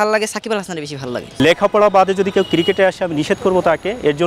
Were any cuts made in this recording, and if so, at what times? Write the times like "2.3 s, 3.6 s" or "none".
1.4 s